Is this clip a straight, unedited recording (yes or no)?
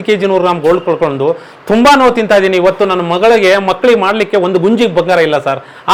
yes